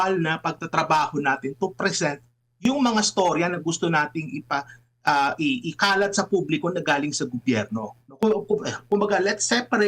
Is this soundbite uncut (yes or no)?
yes